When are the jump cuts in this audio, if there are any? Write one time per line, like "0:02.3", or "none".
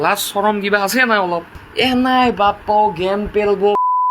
0:01.6